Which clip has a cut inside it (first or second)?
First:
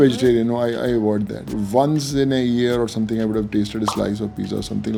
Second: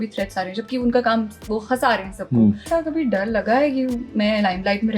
second